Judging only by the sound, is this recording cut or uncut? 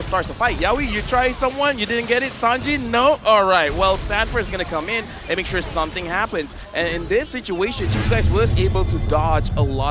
uncut